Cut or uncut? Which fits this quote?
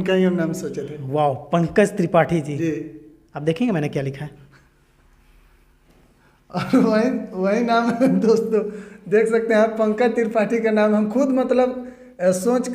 uncut